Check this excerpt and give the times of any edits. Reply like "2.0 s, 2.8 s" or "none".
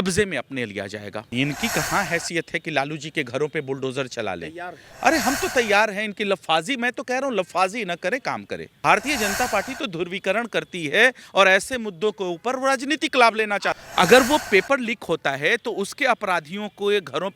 1.2 s, 8.8 s, 13.8 s